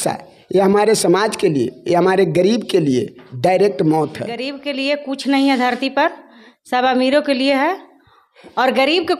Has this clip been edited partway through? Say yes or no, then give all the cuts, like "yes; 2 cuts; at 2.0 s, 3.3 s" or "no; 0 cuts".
yes; 1 cut; at 4.6 s